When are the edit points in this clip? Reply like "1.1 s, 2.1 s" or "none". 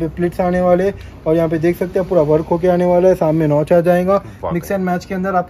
none